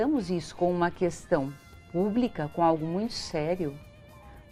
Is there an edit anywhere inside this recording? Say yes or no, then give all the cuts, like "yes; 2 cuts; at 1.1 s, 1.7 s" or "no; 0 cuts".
no; 0 cuts